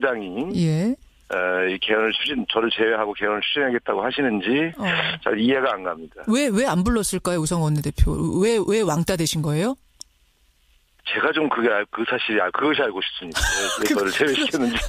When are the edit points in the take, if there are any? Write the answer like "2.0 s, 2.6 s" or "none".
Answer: none